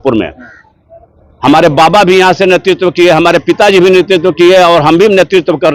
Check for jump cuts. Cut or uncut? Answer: uncut